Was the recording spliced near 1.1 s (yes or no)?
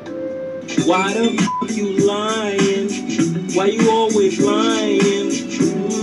no